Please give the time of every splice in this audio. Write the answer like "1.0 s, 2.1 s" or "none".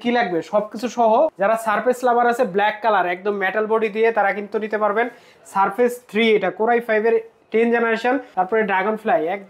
1.3 s, 8.3 s